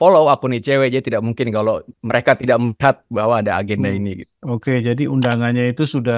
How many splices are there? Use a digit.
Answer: 0